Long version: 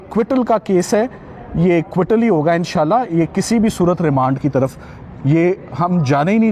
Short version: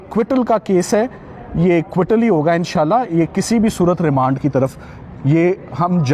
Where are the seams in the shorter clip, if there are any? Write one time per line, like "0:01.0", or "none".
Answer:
none